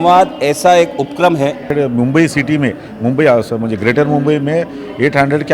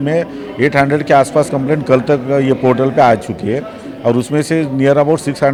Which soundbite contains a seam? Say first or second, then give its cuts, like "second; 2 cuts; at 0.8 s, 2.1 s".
first; 1 cut; at 1.7 s